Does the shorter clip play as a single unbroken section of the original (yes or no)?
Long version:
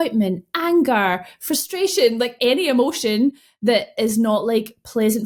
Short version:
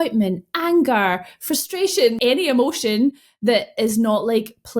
no